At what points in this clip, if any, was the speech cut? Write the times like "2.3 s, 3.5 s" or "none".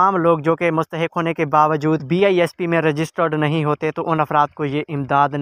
2.0 s